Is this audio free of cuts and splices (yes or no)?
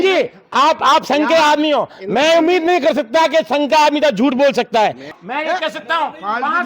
no